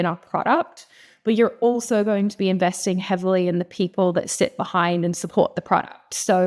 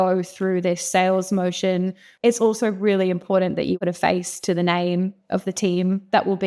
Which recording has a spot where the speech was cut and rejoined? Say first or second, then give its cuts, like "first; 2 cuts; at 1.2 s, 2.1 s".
second; 2 cuts; at 2.0 s, 3.8 s